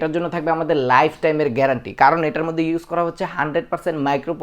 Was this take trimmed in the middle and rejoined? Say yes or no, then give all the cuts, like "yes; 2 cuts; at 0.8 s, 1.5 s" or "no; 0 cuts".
no; 0 cuts